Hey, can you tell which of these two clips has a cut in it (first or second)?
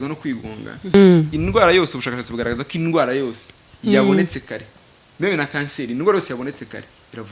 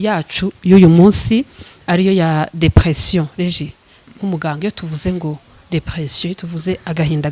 first